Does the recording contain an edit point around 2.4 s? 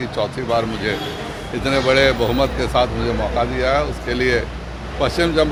no; 0 cuts

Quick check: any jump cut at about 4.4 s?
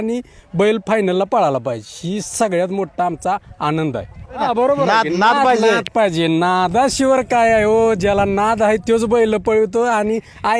yes; 1 cut; at 4.4 s

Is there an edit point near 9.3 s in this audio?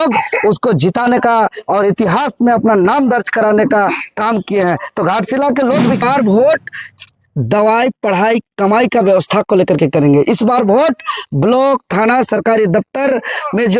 no; 1 cut; at 6.0 s

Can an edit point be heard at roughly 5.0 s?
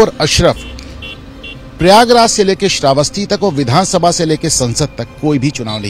no; 0 cuts

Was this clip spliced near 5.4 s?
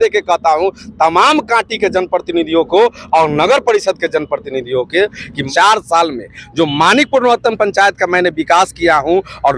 yes; 1 cut; at 5.4 s

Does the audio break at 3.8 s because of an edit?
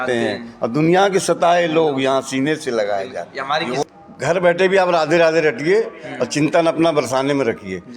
yes; 1 cut; at 3.8 s

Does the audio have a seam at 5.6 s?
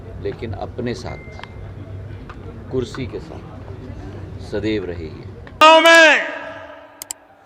yes; 1 cut; at 5.6 s

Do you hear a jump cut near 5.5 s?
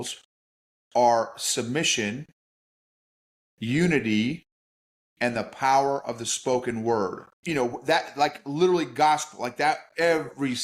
no; 1 cut; at 7.3 s

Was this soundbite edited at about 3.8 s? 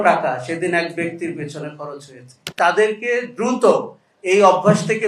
no; 1 cut; at 2.5 s

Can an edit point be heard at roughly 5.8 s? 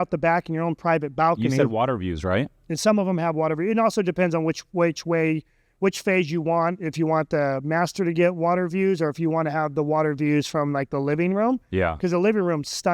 no; 0 cuts

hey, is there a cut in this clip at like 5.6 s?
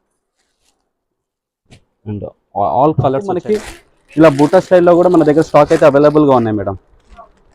no; 1 cut; at 3.4 s

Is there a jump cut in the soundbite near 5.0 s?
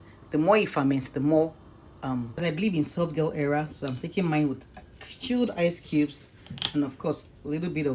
no; 1 cut; at 2.3 s

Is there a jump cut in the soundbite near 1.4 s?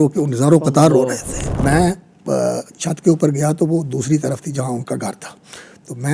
yes; 1 cut; at 1.4 s

